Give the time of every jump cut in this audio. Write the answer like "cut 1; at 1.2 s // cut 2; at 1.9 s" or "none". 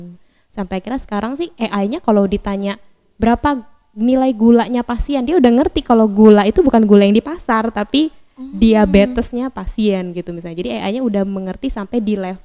none